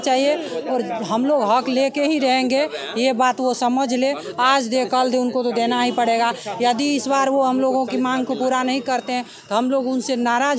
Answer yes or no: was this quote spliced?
no